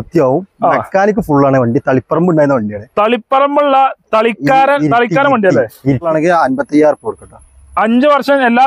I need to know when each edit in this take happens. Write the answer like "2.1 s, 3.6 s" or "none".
6.1 s